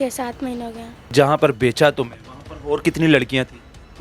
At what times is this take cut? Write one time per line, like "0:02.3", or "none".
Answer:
0:01.1